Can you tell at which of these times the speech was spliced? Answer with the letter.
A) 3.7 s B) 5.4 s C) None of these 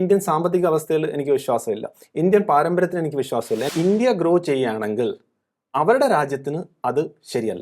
A